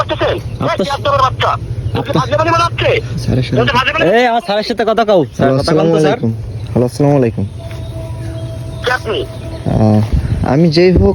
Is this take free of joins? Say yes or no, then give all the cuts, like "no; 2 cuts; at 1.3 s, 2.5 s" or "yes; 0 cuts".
yes; 0 cuts